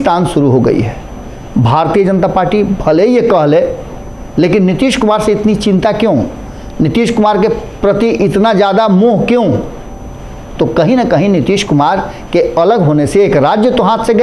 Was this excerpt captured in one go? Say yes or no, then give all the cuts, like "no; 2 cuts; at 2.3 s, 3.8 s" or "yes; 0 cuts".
yes; 0 cuts